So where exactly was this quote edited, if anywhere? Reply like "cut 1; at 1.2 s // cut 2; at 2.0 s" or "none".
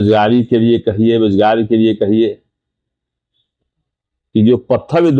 none